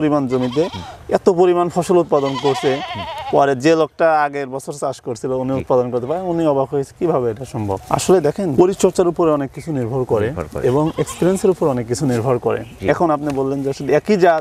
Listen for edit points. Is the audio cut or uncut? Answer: uncut